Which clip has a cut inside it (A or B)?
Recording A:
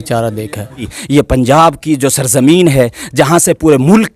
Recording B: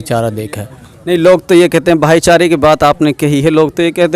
A